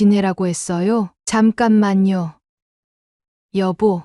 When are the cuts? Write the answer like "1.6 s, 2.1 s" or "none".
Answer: 1.2 s, 2.4 s